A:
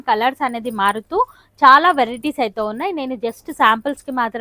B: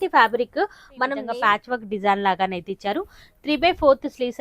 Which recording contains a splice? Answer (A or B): B